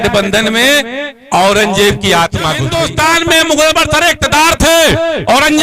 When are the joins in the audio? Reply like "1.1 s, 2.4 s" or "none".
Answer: 2.7 s